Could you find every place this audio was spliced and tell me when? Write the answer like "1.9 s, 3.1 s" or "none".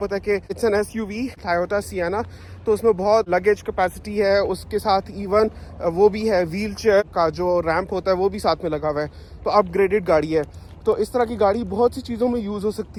none